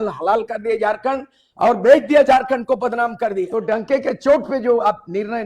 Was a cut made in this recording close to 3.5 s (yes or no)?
yes